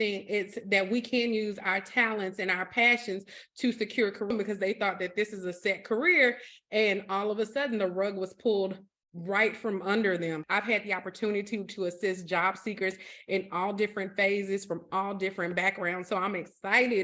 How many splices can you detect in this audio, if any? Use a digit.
2